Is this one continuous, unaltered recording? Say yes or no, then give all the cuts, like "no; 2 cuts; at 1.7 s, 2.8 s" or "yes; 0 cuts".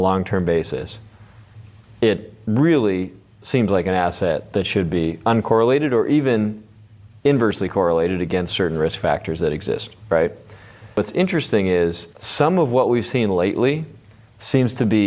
no; 1 cut; at 11.0 s